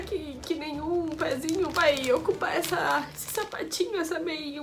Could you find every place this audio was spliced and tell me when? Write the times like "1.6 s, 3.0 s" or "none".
none